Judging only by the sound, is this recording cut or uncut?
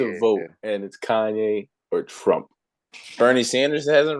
uncut